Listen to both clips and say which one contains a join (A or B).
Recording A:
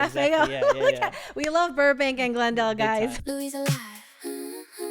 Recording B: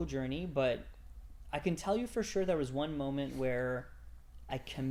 A